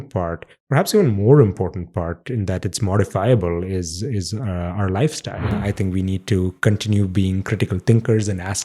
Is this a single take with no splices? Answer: no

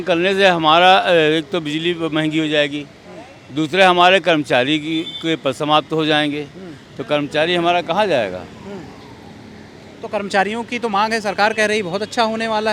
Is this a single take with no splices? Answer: yes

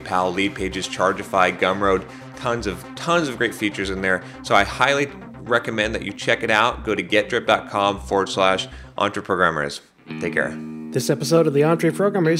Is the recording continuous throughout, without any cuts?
no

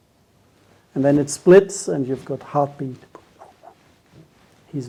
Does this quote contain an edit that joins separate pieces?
no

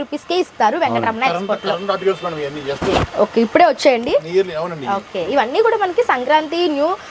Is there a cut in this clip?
no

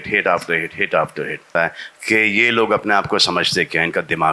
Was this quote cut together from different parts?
yes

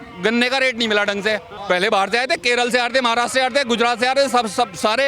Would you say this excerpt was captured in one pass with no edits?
no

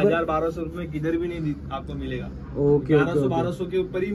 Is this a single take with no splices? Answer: yes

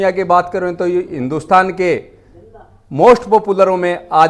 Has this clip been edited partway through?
no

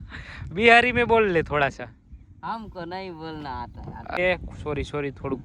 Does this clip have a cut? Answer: yes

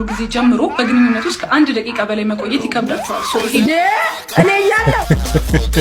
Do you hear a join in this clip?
no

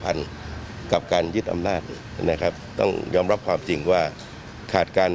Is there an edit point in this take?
no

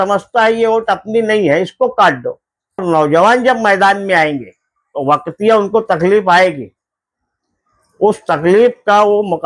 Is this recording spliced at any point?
yes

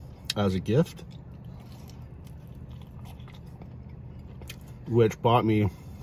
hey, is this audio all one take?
yes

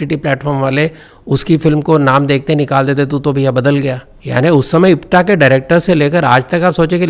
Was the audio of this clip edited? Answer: yes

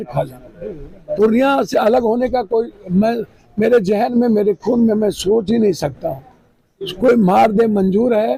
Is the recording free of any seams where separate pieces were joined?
yes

